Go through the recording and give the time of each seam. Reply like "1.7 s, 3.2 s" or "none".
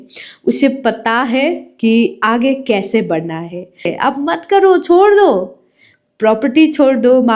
3.9 s